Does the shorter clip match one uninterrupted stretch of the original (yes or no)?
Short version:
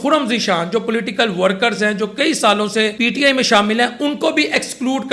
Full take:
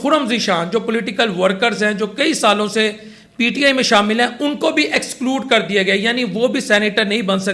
no